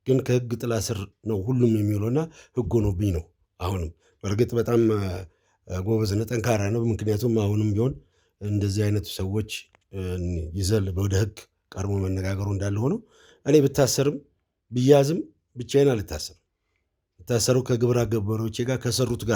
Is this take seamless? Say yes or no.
yes